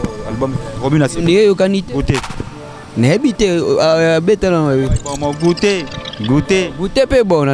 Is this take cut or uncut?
uncut